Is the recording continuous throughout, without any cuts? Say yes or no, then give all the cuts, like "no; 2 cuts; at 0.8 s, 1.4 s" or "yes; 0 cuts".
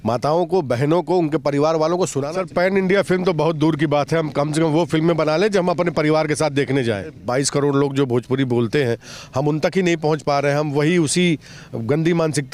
no; 2 cuts; at 2.2 s, 7.2 s